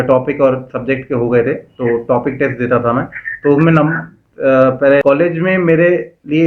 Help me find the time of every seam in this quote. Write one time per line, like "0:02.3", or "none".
0:05.0

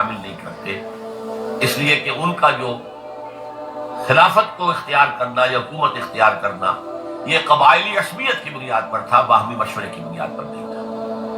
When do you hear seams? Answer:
0:10.4

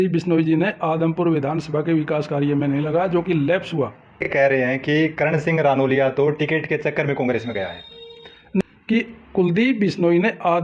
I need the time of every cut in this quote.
0:04.3
0:08.6

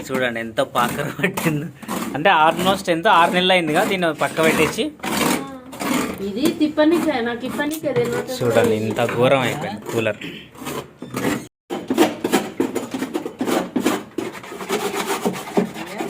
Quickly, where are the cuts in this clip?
none

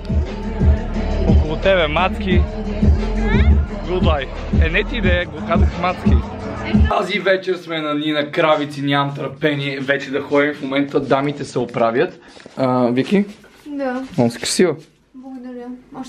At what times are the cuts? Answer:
0:06.9

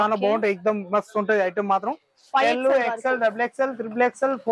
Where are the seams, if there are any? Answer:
0:02.2

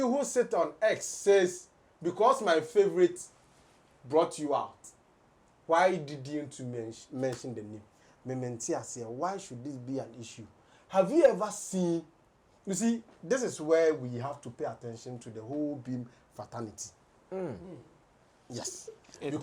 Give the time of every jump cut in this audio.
none

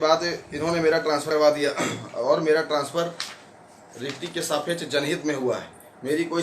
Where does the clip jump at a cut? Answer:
0:01.3

